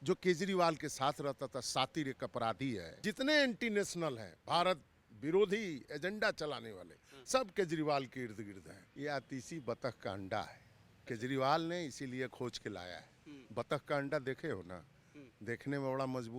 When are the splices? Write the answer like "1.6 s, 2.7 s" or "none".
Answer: 3.0 s, 8.9 s